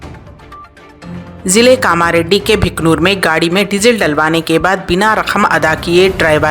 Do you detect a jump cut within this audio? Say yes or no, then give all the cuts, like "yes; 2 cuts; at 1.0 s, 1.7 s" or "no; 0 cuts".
yes; 1 cut; at 1.4 s